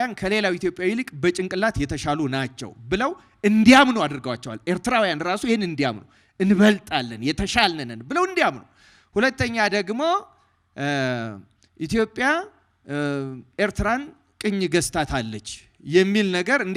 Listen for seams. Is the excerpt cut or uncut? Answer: uncut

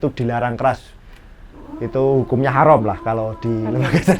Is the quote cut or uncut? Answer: uncut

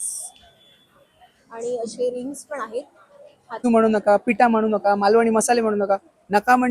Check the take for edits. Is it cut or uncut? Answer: cut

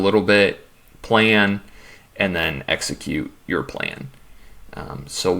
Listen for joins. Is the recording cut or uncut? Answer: uncut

